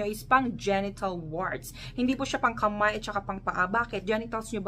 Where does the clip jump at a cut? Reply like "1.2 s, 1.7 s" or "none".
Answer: none